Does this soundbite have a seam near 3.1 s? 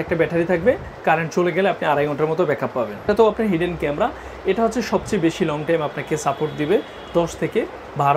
yes; 1 cut; at 3.1 s

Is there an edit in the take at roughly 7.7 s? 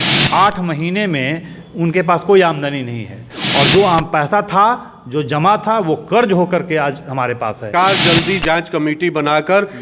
yes; 1 cut; at 7.7 s

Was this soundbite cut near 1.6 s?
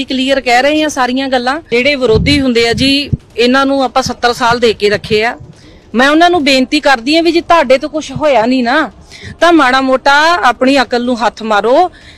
yes; 1 cut; at 1.6 s

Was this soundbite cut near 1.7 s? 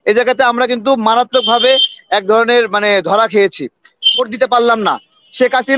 no; 1 cut; at 4.3 s

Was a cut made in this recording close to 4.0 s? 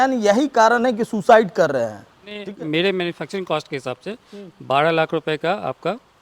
no; 1 cut; at 2.5 s

